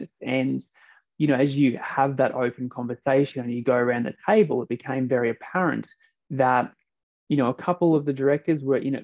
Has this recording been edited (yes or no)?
no